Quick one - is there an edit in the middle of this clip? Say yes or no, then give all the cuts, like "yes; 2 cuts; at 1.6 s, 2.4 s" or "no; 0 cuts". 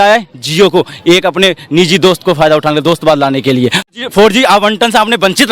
yes; 1 cut; at 3.9 s